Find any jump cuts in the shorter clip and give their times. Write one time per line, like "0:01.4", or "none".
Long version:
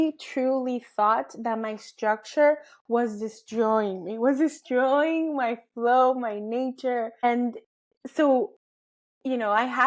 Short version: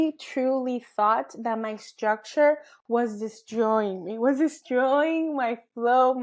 none